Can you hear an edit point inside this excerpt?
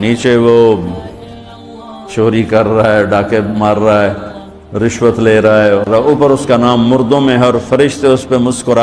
yes; 1 cut; at 6.0 s

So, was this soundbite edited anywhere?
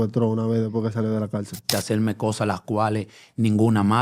yes; 1 cut; at 1.7 s

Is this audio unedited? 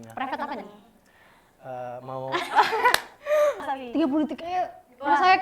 no; 1 cut; at 3.6 s

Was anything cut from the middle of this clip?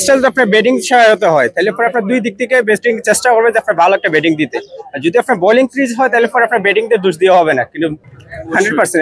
yes; 1 cut; at 8.0 s

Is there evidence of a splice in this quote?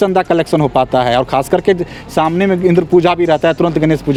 no; 0 cuts

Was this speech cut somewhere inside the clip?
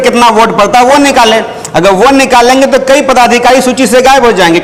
no; 0 cuts

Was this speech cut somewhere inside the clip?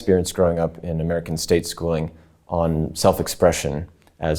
no; 0 cuts

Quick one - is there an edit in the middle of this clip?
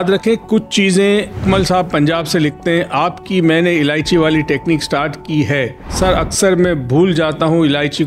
yes; 2 cuts; at 1.4 s, 5.8 s

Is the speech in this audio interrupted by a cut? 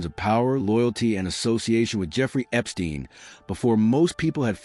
yes; 1 cut; at 3.2 s

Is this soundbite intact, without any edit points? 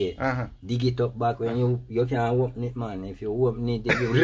yes; 0 cuts

